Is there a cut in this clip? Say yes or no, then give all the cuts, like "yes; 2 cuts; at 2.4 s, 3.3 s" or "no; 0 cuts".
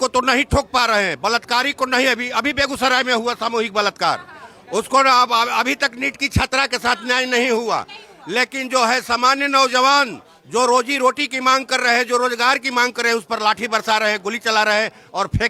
no; 0 cuts